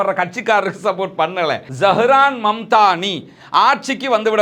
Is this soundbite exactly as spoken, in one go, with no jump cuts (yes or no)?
no